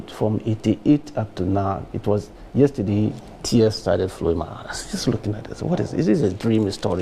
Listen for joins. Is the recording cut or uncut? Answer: uncut